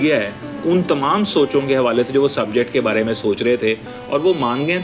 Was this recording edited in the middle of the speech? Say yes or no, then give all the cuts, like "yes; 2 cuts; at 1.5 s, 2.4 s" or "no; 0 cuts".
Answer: no; 0 cuts